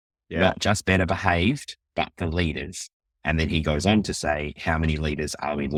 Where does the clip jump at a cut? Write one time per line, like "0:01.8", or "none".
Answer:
none